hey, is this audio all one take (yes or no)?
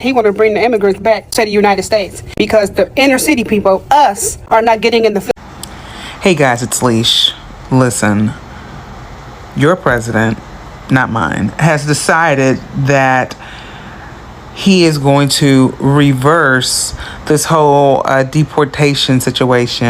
no